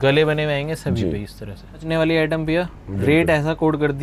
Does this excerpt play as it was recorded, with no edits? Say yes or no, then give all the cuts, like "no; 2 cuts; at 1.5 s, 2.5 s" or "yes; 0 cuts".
no; 1 cut; at 1.8 s